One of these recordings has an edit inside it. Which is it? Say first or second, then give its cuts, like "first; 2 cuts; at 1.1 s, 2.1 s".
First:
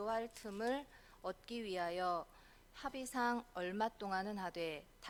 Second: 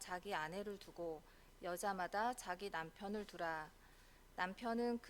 second; 1 cut; at 4.0 s